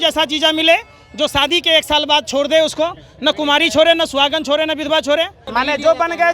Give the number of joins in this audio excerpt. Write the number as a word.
one